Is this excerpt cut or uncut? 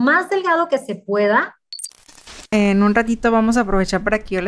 cut